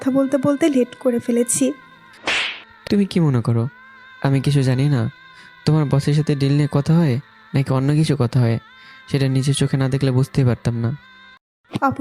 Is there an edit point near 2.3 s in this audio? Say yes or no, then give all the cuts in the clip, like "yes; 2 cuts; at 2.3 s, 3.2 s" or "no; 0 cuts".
yes; 1 cut; at 2.3 s